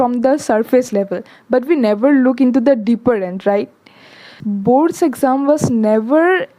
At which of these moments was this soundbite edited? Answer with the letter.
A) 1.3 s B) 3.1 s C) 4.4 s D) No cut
C